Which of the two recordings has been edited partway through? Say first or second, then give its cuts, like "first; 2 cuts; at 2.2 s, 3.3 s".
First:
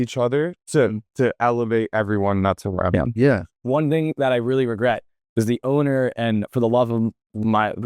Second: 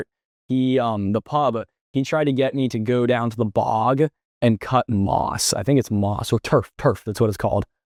first; 1 cut; at 3.5 s